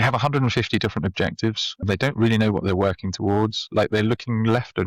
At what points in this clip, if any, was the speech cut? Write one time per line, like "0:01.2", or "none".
0:01.8